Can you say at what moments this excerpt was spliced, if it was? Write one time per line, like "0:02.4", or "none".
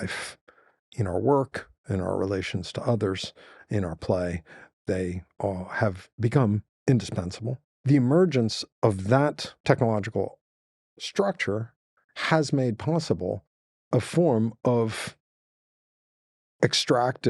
0:06.7
0:07.7
0:09.5